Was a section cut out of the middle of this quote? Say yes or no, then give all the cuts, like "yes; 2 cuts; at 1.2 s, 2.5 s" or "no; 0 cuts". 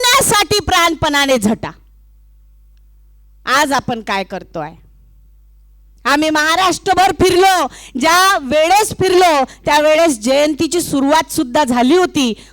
no; 0 cuts